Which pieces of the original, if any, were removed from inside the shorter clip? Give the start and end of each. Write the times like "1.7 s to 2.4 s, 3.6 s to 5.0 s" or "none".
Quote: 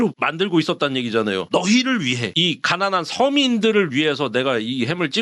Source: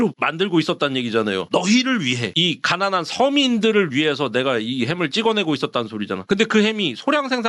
none